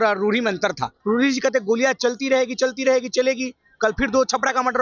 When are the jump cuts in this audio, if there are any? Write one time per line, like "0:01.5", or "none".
0:01.0